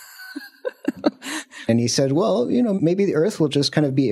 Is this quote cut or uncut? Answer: cut